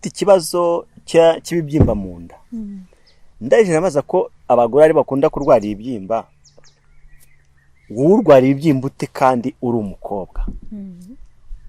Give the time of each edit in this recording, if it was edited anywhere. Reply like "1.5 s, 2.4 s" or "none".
none